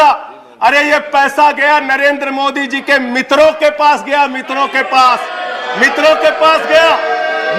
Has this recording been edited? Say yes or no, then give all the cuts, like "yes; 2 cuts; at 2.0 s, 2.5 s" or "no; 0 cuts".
no; 0 cuts